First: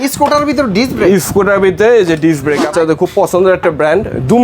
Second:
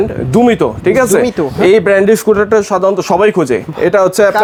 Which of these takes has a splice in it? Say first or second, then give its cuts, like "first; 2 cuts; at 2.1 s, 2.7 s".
first; 1 cut; at 2.6 s